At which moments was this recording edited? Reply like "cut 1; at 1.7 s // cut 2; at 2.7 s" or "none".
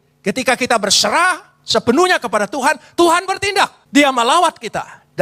cut 1; at 3.8 s